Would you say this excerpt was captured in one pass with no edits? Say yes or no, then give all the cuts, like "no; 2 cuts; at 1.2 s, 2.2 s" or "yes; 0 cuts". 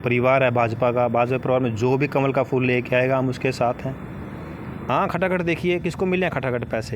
no; 1 cut; at 4.8 s